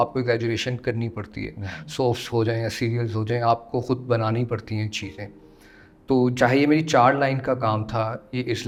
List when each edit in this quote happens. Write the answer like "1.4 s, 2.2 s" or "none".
none